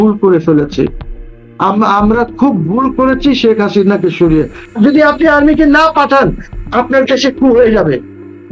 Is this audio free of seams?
no; 1 cut; at 4.8 s

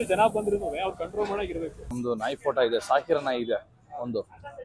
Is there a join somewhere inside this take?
yes; 1 cut; at 1.9 s

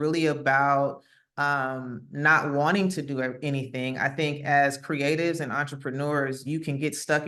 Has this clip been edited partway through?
no; 0 cuts

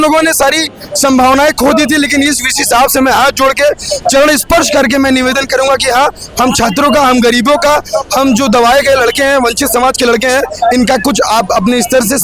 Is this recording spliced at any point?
no; 0 cuts

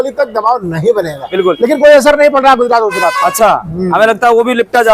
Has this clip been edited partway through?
yes; 1 cut; at 1.2 s

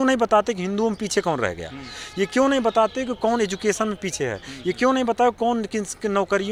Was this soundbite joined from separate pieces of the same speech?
no; 0 cuts

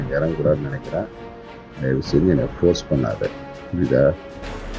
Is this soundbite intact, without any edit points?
yes; 0 cuts

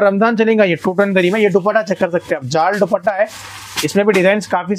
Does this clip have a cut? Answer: no; 0 cuts

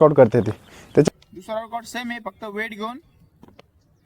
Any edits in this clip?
yes; 1 cut; at 1.1 s

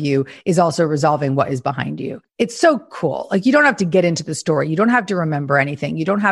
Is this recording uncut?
no; 1 cut; at 2.2 s

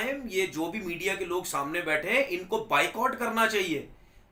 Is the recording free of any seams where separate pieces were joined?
yes; 0 cuts

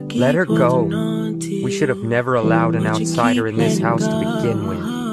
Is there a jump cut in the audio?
no; 0 cuts

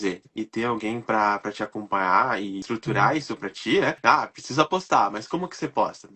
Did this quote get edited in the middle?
yes; 2 cuts; at 2.6 s, 4.0 s

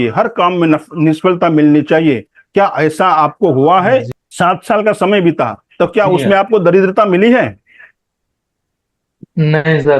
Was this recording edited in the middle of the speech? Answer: yes; 1 cut; at 4.1 s

